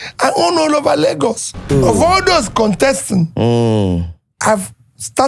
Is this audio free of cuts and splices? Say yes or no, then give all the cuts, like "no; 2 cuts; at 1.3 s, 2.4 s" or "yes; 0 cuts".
yes; 0 cuts